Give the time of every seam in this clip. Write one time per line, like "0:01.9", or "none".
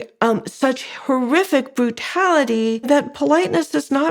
0:02.9